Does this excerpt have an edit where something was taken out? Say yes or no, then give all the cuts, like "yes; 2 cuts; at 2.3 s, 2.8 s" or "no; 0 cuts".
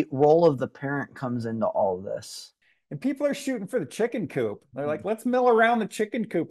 yes; 1 cut; at 2.5 s